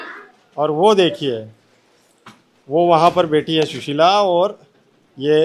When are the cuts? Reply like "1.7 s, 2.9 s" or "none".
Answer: none